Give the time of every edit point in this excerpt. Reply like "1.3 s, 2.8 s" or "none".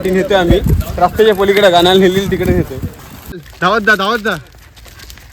3.4 s